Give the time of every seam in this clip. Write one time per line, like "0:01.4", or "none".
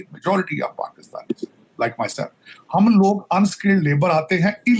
none